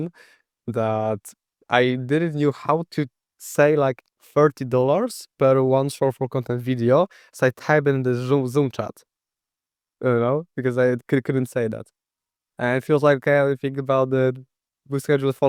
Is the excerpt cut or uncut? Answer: uncut